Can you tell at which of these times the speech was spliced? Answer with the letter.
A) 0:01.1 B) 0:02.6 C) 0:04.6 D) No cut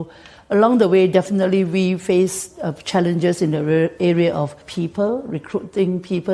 C